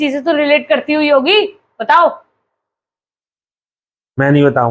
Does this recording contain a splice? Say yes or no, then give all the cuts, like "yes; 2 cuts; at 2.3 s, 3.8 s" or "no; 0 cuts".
no; 0 cuts